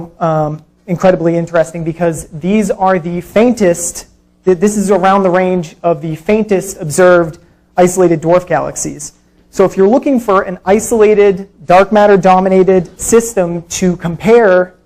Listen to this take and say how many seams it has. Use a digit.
1